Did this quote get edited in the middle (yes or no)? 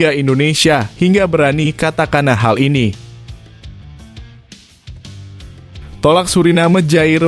yes